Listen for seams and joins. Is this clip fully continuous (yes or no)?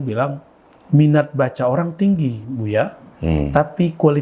yes